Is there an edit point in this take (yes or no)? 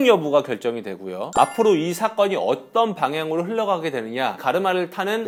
no